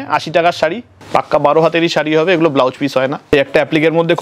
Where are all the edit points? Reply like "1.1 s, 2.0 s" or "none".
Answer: 0.9 s, 3.3 s